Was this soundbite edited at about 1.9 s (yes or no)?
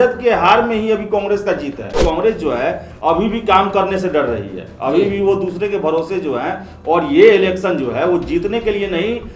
yes